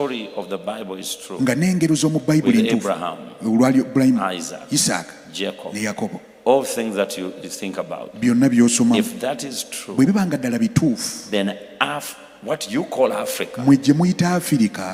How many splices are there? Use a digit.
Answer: 0